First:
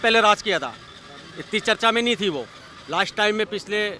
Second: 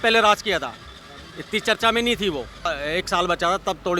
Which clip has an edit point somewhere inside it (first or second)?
second